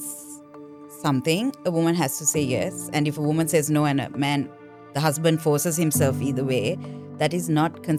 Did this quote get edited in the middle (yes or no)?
no